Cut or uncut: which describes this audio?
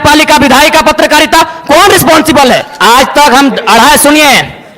cut